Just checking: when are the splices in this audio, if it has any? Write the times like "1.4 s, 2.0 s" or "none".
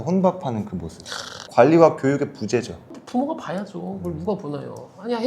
2.9 s